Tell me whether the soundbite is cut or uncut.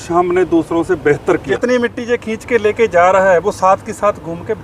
cut